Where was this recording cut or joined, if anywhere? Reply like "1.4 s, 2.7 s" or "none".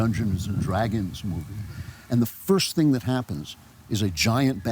3.5 s

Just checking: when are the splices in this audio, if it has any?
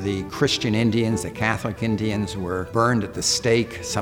2.7 s

